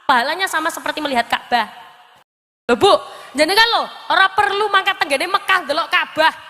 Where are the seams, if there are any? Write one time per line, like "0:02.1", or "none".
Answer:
0:02.5